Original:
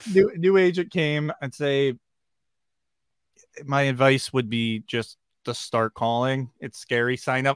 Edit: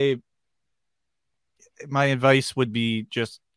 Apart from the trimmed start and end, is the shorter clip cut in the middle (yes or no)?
no